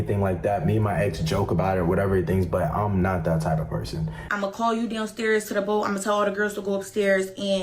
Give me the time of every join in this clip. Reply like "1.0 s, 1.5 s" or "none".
4.3 s